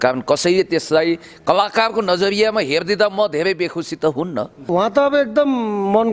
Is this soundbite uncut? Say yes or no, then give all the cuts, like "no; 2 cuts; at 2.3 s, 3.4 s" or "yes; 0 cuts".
no; 1 cut; at 4.6 s